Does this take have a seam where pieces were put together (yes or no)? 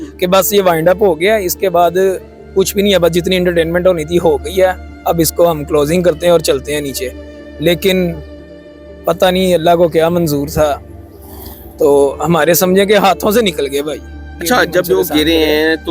yes